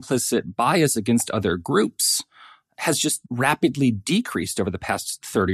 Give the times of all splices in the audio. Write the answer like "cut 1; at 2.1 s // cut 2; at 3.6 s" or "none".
cut 1; at 3.2 s